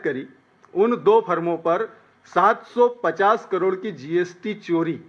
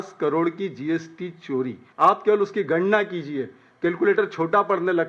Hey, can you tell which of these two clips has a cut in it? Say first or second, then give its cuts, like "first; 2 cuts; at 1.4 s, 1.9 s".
second; 1 cut; at 1.8 s